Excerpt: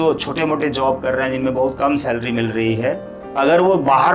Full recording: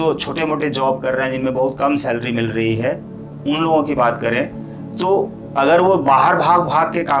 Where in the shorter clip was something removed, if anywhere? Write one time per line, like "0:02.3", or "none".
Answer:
0:03.2